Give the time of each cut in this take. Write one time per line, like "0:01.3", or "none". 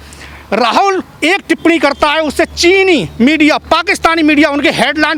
none